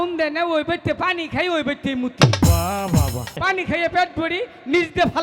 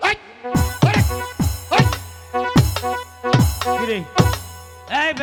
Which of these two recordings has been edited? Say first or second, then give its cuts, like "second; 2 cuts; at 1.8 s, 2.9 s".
first; 1 cut; at 3.4 s